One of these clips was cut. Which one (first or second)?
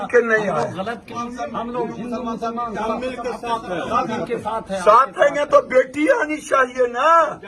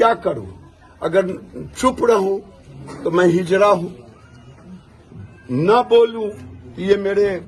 first